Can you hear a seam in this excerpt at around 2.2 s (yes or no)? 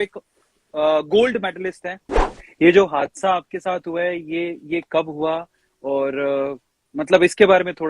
yes